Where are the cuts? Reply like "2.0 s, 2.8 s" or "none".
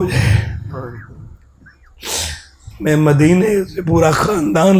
none